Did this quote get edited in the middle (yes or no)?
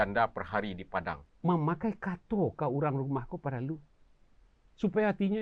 yes